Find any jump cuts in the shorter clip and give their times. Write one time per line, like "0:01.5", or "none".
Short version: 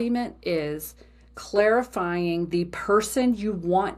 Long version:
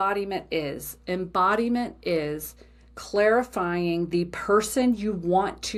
none